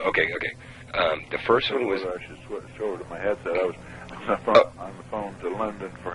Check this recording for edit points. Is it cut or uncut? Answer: cut